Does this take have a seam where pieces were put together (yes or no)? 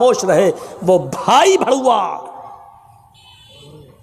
no